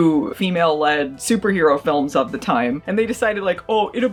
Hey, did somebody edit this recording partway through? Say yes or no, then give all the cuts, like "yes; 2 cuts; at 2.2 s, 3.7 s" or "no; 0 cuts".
no; 0 cuts